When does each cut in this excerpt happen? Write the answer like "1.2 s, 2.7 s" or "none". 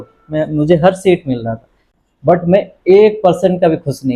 none

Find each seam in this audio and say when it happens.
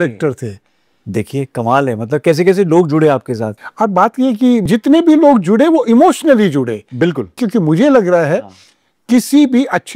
3.5 s, 4.7 s, 7.4 s

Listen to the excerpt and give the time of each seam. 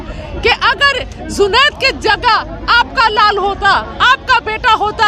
none

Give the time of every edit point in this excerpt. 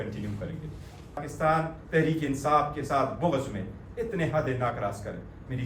1.3 s

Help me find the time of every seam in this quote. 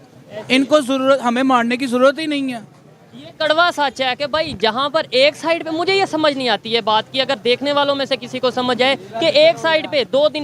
none

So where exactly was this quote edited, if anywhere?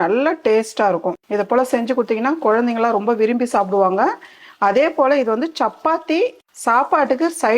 1.2 s, 6.5 s

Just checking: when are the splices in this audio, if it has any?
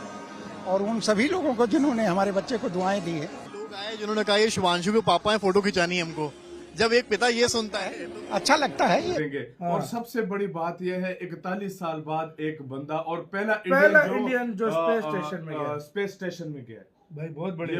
9.2 s

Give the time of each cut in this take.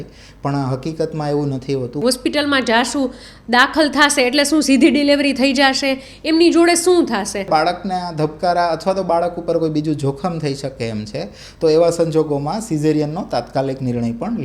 2.0 s, 7.5 s

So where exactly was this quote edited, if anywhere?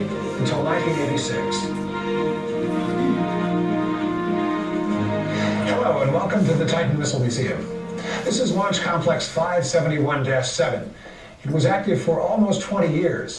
2.5 s

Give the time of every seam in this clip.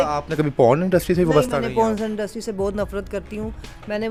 none

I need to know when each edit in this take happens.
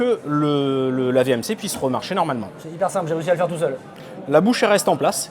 none

